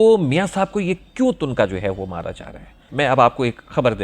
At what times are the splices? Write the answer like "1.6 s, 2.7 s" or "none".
2.9 s